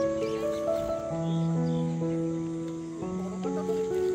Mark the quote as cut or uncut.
uncut